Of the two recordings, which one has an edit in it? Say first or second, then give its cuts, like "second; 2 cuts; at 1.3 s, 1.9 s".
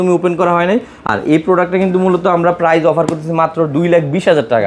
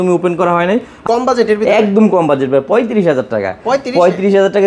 second; 1 cut; at 1.1 s